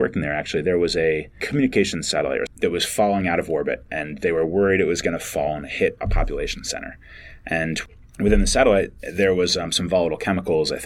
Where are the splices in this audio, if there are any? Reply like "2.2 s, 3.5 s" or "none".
1.4 s, 2.5 s